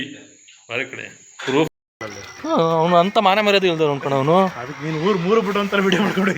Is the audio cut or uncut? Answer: cut